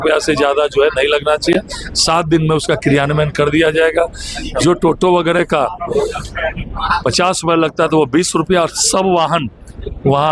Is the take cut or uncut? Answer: uncut